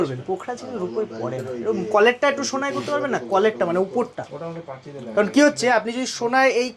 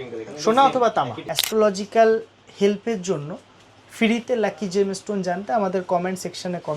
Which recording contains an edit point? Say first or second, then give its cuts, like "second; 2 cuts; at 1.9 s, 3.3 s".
second; 1 cut; at 1.2 s